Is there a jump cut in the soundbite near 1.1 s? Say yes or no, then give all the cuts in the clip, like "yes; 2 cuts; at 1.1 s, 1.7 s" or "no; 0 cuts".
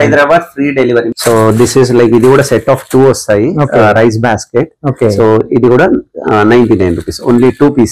yes; 1 cut; at 1.1 s